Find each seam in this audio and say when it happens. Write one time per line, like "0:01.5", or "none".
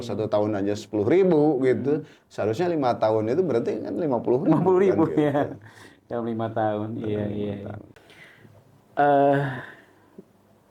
none